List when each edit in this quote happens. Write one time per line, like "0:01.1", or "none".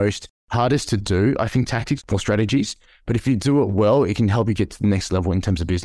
0:02.0